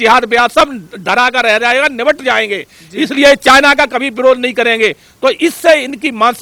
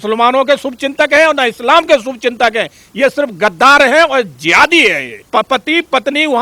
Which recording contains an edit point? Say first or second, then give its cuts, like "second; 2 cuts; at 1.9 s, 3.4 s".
second; 1 cut; at 5.1 s